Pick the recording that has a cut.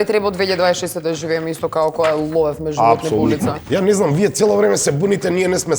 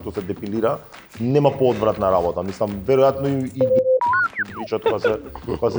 first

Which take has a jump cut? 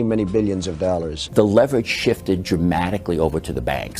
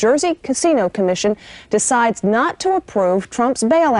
first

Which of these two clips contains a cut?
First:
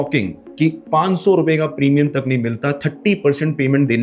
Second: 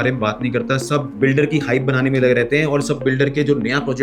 second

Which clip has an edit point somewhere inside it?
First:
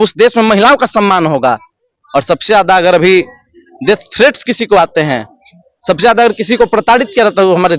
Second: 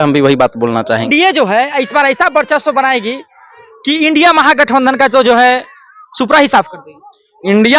second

